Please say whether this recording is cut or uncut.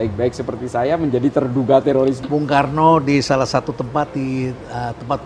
cut